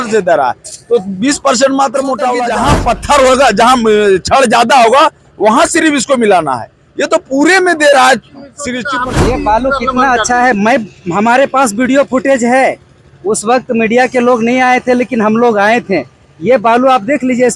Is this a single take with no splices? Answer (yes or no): no